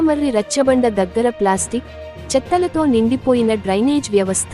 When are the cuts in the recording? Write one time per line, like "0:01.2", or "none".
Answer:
none